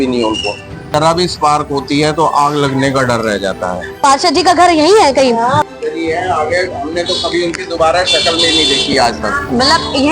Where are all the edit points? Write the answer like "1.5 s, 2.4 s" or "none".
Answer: 0.9 s, 3.9 s, 5.6 s